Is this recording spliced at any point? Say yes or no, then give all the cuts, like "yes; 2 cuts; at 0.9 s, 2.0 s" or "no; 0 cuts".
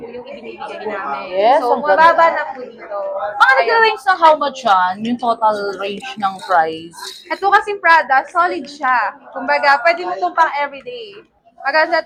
no; 0 cuts